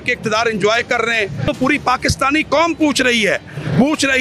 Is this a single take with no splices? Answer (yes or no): no